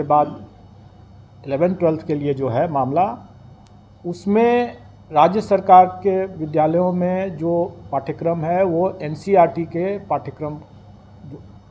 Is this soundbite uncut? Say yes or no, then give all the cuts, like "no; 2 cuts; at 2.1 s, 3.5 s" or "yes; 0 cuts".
yes; 0 cuts